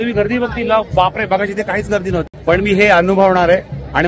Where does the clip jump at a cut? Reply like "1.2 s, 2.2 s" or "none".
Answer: 2.2 s